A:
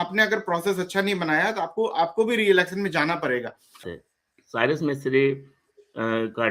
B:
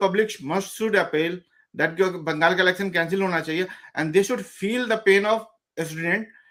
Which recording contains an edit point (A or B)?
A